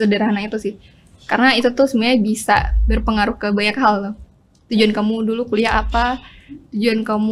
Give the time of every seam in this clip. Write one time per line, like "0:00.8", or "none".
none